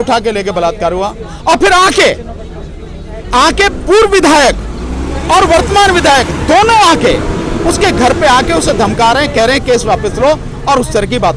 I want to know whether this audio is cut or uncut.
uncut